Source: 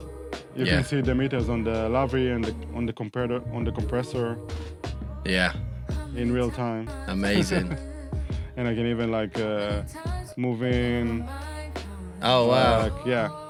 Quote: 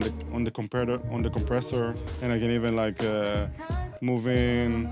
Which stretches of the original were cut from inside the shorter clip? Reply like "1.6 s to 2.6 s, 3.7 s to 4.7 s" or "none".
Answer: 4.5 s to 8.4 s